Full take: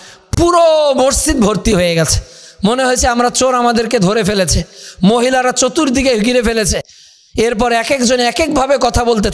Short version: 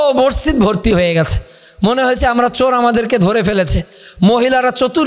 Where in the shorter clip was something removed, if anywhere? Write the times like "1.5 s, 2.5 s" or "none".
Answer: none